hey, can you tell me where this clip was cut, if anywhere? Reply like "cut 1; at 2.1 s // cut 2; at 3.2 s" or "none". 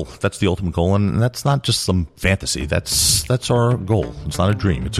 none